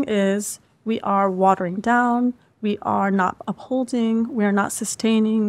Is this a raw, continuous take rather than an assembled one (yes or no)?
yes